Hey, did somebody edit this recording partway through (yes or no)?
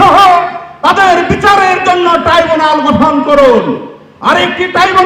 no